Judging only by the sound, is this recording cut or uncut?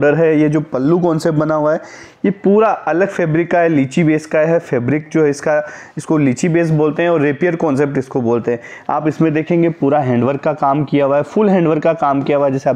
uncut